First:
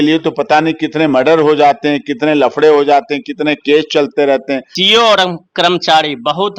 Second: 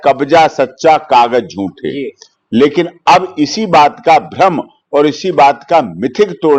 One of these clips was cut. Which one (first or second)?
first